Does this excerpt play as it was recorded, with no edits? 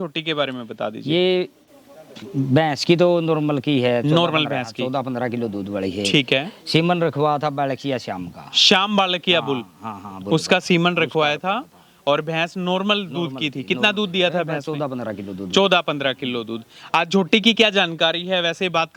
yes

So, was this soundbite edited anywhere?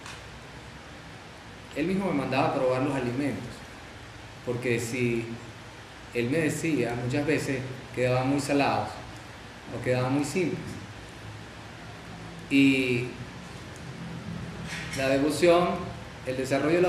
no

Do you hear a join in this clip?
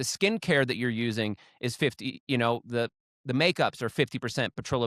no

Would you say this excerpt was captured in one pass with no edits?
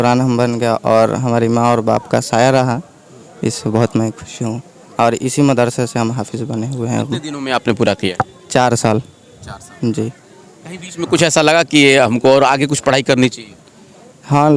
yes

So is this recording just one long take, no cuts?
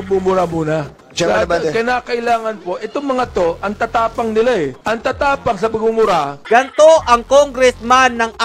no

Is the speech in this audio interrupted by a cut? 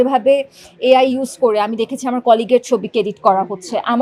no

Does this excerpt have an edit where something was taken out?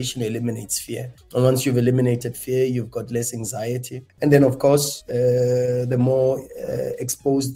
no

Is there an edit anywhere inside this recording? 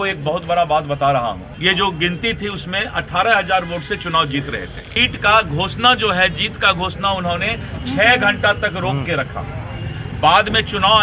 yes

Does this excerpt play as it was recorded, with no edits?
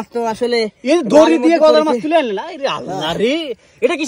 yes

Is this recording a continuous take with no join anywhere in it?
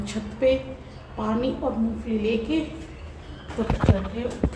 yes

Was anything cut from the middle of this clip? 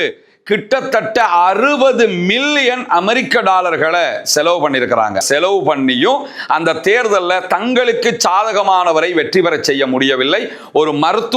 yes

